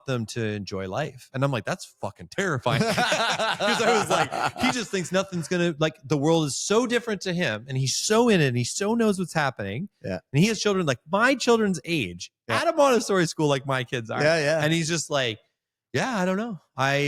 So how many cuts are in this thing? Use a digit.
0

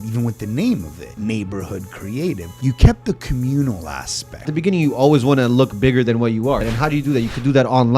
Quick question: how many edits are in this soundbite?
4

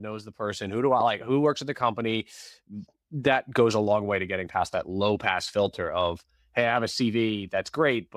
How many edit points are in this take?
0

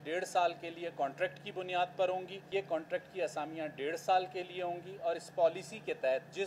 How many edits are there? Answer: 1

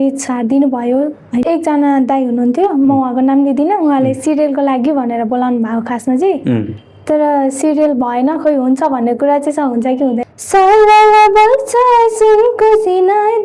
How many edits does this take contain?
2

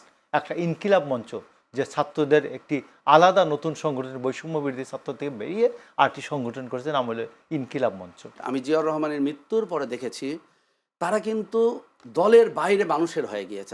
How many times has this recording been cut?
1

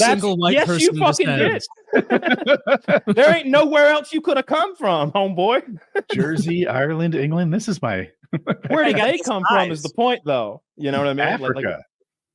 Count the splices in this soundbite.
0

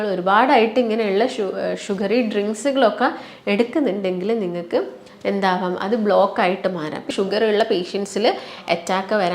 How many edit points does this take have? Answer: 1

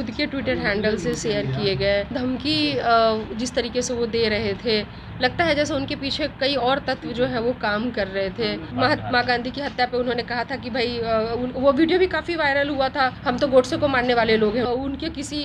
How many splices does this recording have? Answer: 4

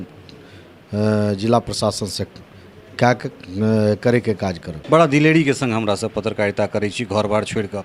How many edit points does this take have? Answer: 1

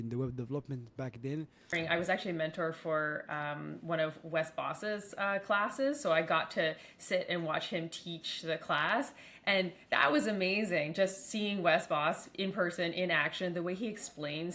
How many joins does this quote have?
1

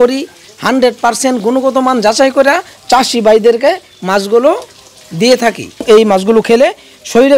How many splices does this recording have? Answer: 1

